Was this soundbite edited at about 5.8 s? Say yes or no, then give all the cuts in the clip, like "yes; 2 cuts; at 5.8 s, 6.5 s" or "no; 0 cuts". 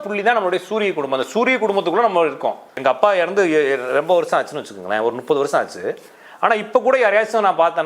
no; 1 cut; at 2.8 s